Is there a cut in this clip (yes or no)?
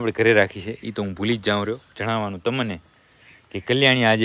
no